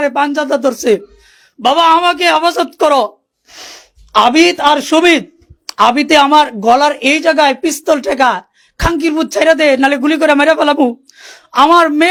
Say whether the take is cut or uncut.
uncut